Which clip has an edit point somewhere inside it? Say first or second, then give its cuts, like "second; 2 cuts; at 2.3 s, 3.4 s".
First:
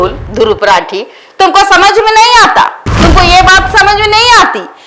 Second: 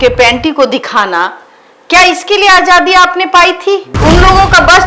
second; 1 cut; at 3.9 s